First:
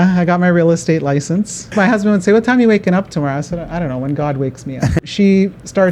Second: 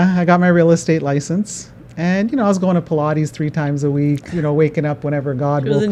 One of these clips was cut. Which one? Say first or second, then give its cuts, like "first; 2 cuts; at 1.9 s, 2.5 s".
first; 2 cuts; at 1.7 s, 4.9 s